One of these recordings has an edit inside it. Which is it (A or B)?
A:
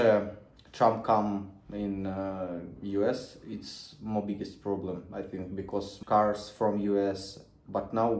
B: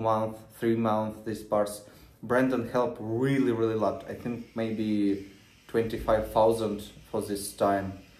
A